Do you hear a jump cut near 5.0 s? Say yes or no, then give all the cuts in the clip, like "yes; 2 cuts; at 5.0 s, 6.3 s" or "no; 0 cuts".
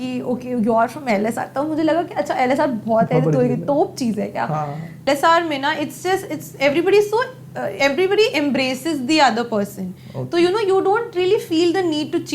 yes; 1 cut; at 5.0 s